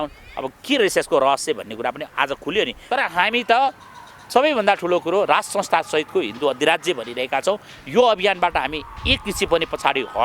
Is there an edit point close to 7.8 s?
no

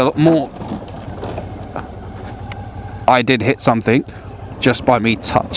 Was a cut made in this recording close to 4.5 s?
yes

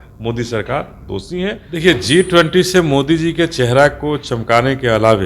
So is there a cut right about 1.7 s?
yes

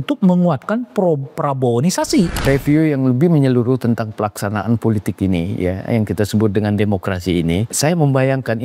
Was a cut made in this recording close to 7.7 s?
yes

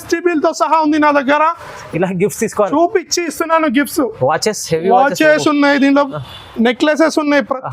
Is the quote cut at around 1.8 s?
yes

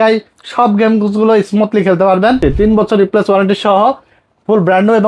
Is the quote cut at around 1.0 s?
no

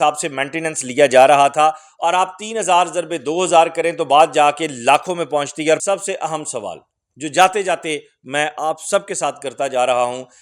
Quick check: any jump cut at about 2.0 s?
no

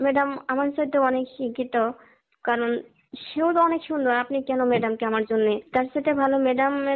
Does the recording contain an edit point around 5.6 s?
yes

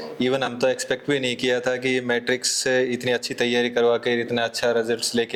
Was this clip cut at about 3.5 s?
no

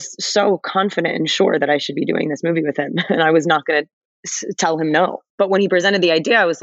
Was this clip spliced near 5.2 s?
yes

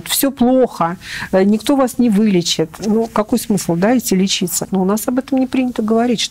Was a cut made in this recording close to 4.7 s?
yes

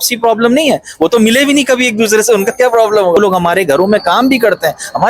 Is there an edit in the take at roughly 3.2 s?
yes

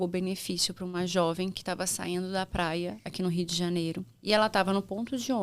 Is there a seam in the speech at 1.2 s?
no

